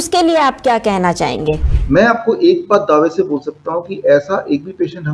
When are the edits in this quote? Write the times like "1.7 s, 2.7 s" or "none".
1.7 s

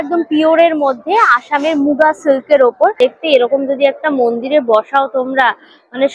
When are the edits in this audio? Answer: 3.0 s

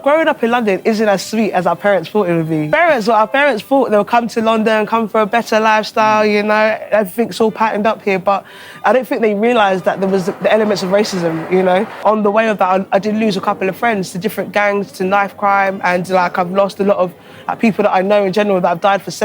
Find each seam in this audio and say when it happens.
2.7 s, 12.0 s

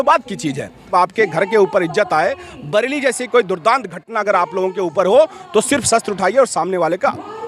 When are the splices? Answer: 0.9 s

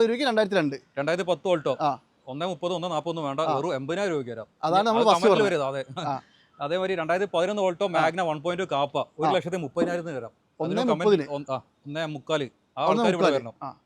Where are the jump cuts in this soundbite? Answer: none

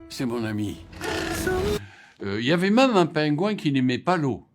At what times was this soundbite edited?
1.8 s

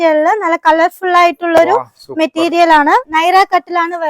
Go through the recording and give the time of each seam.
3.1 s

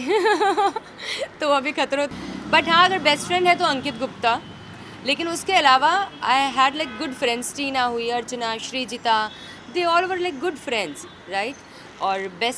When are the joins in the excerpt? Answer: 2.1 s

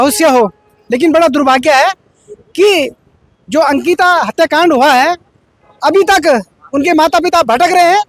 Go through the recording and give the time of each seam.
none

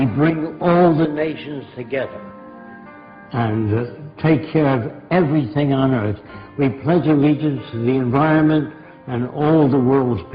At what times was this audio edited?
4.1 s

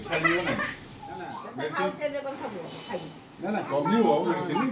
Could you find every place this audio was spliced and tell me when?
1.3 s

